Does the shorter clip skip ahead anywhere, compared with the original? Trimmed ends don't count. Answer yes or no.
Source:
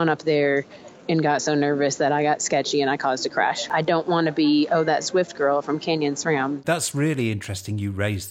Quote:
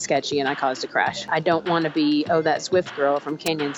no